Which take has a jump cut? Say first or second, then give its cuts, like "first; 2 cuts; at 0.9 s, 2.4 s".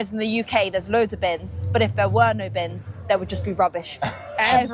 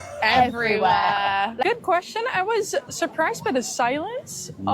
second; 1 cut; at 1.5 s